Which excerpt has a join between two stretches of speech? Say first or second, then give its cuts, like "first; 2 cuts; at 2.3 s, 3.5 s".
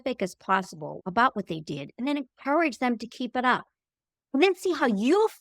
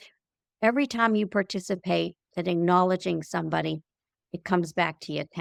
first; 1 cut; at 1.0 s